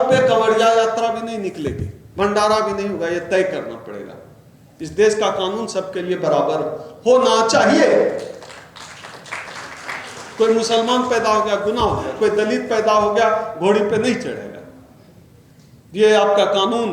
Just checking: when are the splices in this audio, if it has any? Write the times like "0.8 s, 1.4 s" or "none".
none